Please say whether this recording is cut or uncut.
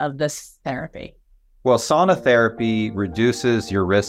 uncut